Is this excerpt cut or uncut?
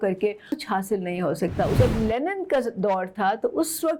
cut